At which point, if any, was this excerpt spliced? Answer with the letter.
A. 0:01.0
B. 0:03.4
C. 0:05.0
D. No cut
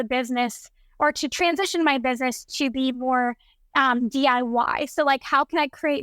D